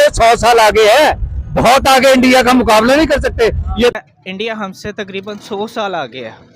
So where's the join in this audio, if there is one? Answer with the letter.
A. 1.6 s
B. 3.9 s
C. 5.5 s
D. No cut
B